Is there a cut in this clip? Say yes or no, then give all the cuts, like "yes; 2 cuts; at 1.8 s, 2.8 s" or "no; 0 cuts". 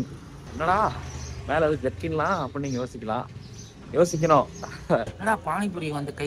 yes; 1 cut; at 5.1 s